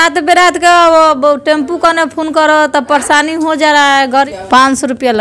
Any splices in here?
yes; 1 cut; at 4.3 s

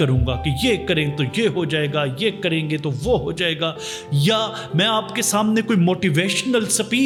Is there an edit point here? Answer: no; 0 cuts

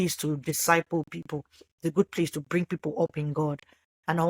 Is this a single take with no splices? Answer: yes; 0 cuts

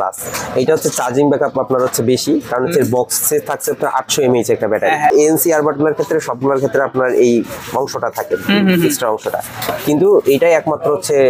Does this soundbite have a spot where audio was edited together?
yes; 1 cut; at 5.1 s

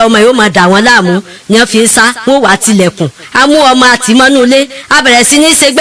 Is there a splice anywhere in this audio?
yes; 1 cut; at 3.2 s

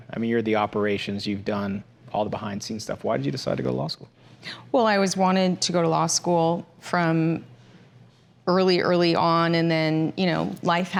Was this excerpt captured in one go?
yes; 0 cuts

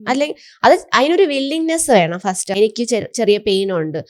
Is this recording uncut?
no; 1 cut; at 2.5 s

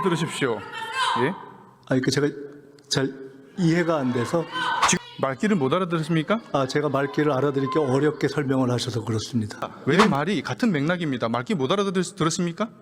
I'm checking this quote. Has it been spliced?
yes; 2 cuts; at 5.0 s, 9.9 s

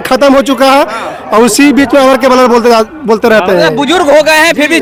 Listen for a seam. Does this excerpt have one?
no; 0 cuts

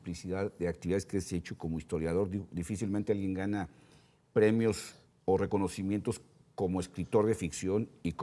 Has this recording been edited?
yes; 1 cut; at 1.3 s

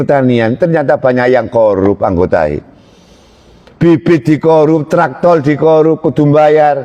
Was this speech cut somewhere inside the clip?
no; 0 cuts

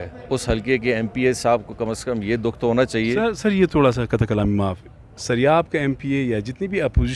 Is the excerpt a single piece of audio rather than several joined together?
yes; 0 cuts

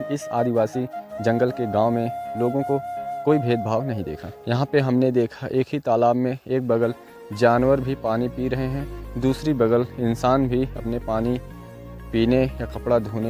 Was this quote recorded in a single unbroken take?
yes; 0 cuts

